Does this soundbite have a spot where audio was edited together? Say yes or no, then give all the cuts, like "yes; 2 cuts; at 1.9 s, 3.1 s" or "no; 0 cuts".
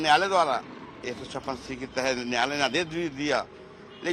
no; 0 cuts